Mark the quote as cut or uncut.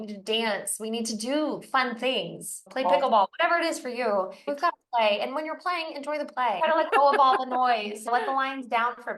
cut